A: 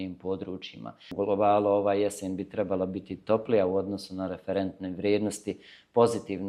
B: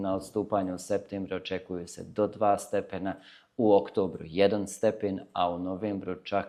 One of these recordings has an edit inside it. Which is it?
A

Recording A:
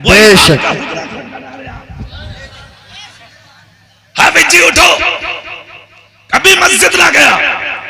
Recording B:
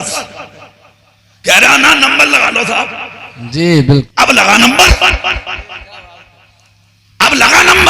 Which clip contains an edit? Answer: B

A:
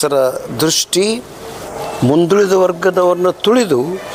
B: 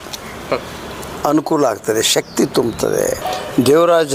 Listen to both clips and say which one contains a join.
B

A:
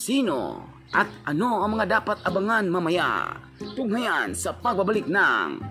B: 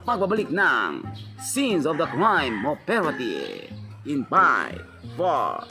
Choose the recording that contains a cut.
B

